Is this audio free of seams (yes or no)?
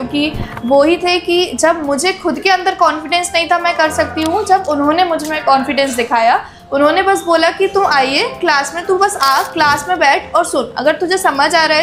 yes